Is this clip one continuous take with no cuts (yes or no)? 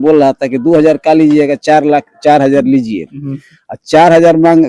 yes